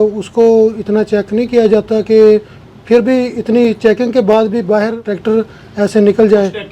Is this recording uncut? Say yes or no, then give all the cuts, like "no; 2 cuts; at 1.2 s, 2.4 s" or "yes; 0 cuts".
no; 1 cut; at 5.1 s